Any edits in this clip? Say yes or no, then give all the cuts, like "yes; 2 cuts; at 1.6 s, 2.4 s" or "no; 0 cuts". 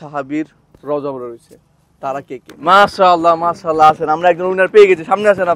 yes; 1 cut; at 2.7 s